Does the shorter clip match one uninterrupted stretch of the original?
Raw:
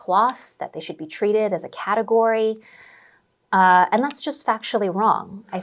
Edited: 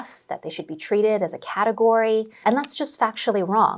no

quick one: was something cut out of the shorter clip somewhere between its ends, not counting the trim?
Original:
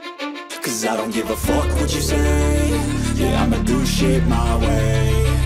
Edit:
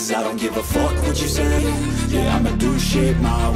yes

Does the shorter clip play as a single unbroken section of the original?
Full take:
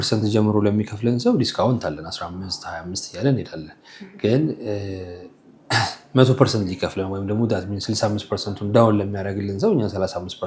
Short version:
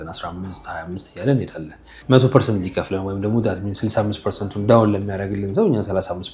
no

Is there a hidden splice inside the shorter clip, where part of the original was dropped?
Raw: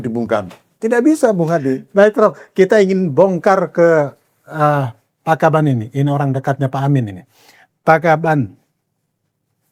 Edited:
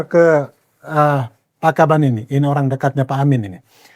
no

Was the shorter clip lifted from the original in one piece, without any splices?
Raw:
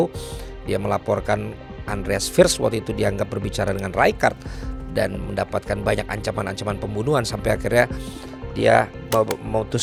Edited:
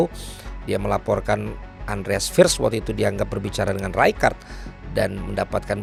yes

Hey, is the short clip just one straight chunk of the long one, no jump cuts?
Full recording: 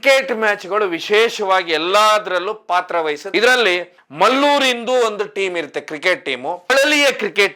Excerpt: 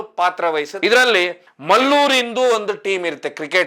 yes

